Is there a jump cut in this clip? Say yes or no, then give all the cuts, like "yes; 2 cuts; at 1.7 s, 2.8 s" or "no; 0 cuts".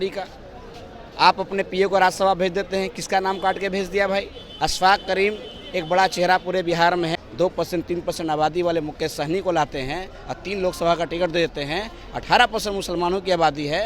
yes; 1 cut; at 7.2 s